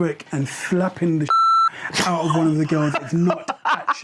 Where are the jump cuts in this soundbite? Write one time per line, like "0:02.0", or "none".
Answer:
none